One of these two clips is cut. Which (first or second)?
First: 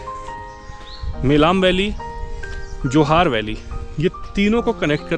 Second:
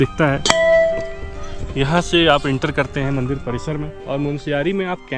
second